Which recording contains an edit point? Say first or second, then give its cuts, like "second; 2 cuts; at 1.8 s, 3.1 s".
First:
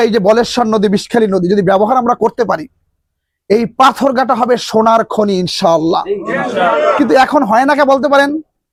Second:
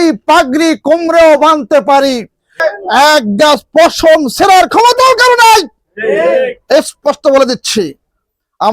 second; 1 cut; at 2.6 s